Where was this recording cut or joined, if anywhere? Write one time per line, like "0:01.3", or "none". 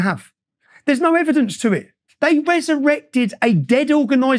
0:02.0